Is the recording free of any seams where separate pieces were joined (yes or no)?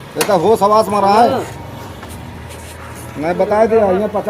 no